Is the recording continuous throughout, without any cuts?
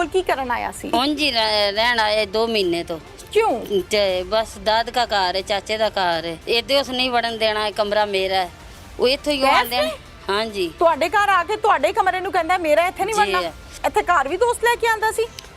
no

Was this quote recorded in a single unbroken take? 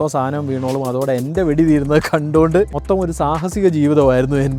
no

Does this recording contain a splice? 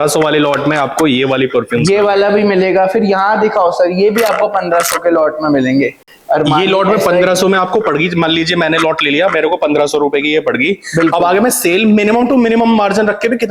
no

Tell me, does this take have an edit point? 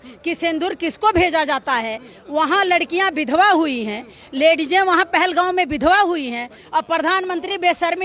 no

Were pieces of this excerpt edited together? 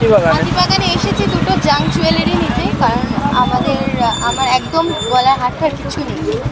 no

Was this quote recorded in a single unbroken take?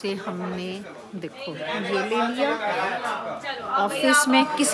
yes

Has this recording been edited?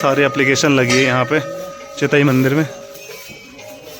no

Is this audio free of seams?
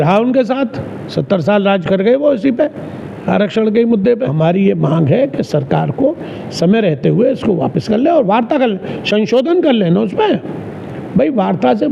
no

